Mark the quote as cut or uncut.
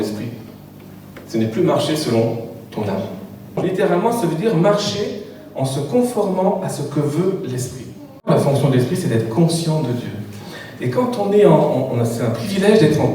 cut